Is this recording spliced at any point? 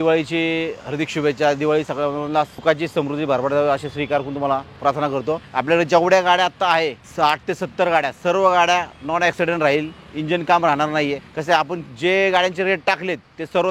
yes; 4 cuts; at 2.5 s, 5.5 s, 7.0 s, 11.3 s

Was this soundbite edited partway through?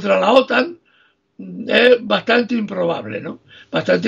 no; 0 cuts

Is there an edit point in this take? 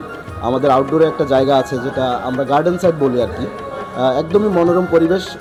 no; 0 cuts

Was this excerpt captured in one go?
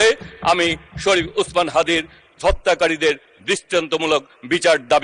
yes; 0 cuts

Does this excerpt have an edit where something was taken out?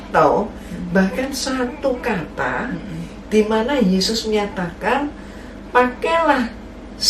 no; 0 cuts

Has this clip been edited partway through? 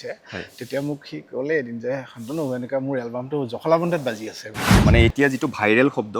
yes; 1 cut; at 4.7 s

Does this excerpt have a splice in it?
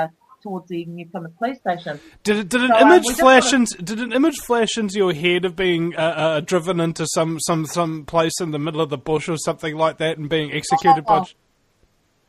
yes; 1 cut; at 3.1 s

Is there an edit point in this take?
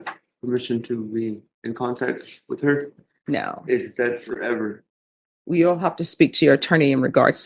no; 0 cuts

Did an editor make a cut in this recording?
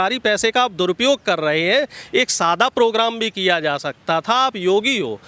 no; 0 cuts

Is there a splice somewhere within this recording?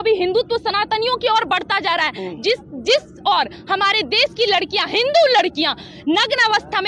no; 0 cuts

